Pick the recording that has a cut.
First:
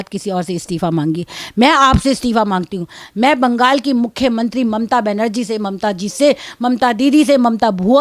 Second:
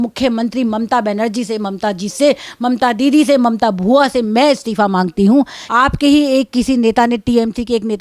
second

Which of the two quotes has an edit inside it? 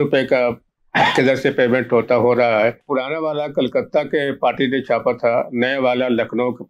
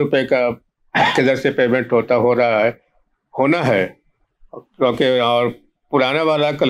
first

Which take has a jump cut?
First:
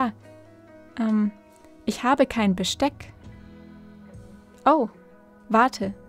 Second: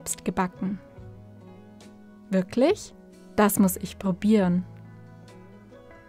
second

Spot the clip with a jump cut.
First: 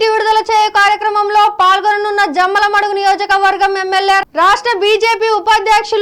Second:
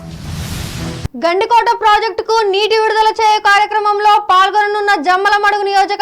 second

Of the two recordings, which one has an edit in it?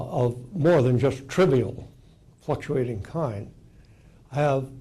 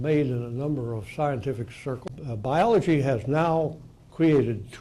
second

